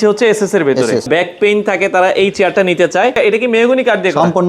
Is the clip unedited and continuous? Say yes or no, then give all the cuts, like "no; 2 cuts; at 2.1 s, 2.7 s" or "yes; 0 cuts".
no; 2 cuts; at 1.1 s, 3.1 s